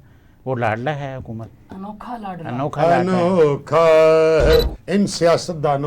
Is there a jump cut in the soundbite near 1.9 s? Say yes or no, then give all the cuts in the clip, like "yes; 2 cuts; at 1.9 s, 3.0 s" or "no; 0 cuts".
no; 1 cut; at 4.8 s